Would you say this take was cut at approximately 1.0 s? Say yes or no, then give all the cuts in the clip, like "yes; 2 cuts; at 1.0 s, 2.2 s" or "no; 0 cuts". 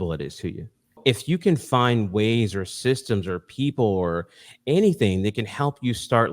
yes; 1 cut; at 1.0 s